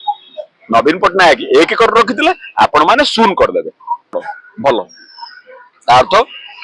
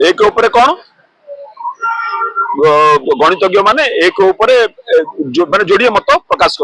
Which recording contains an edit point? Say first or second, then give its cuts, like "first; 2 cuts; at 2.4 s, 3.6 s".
first; 1 cut; at 4.1 s